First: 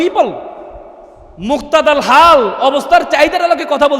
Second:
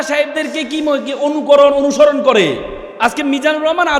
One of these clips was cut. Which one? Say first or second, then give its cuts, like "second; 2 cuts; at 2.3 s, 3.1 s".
second; 1 cut; at 2.8 s